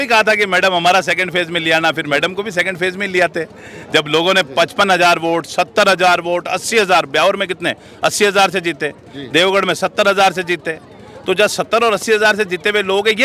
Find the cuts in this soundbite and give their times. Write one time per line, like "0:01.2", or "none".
none